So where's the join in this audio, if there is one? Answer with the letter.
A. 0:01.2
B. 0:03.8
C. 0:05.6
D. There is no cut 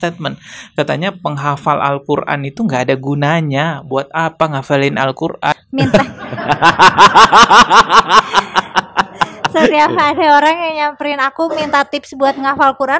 C